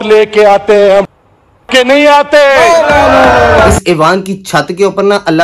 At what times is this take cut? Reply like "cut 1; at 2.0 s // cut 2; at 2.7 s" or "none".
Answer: cut 1; at 3.7 s